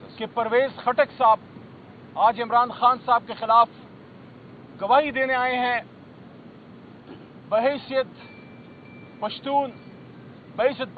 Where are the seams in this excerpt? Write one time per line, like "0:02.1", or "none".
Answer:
none